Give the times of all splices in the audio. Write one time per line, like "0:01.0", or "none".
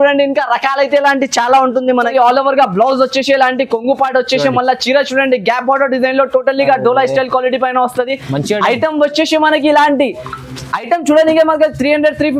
0:01.9